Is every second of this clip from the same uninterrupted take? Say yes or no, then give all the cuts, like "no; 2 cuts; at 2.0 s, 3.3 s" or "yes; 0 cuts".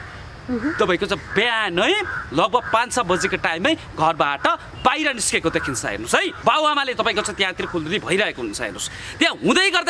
no; 1 cut; at 6.3 s